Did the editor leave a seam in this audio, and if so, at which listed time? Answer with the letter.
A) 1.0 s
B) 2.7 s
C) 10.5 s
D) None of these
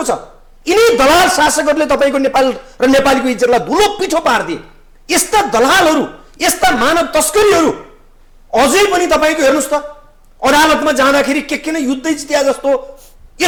D